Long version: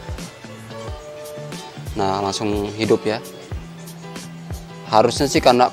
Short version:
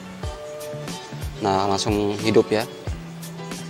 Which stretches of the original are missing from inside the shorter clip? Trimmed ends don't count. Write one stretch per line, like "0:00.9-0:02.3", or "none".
0:03.2-0:03.3